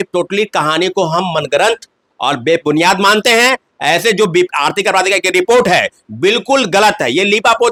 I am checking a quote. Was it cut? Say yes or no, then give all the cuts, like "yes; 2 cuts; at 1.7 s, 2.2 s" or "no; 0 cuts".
no; 0 cuts